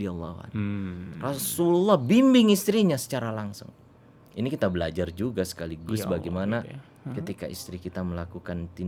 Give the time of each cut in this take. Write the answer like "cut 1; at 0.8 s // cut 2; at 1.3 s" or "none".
none